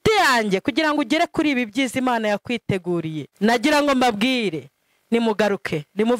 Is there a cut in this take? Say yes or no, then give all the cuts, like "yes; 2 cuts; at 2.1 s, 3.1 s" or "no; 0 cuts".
yes; 1 cut; at 3.3 s